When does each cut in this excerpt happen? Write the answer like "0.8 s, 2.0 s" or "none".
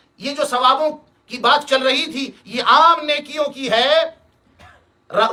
none